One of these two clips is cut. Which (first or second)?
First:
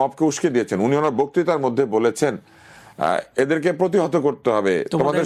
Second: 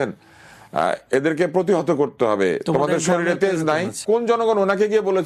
second